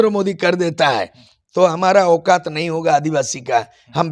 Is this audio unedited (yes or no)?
yes